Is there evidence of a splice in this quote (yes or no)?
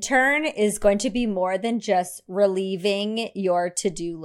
no